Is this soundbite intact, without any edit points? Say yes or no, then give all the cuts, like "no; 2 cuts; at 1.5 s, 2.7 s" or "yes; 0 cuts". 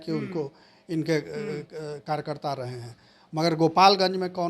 yes; 0 cuts